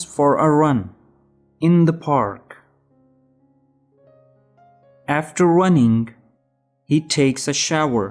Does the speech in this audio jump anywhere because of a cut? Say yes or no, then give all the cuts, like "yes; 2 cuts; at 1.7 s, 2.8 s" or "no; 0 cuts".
yes; 2 cuts; at 3.3 s, 5.0 s